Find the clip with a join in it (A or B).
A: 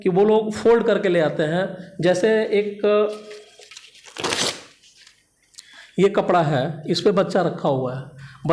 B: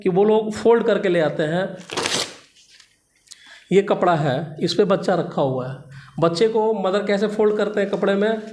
B